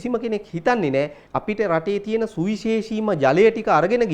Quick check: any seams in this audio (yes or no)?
yes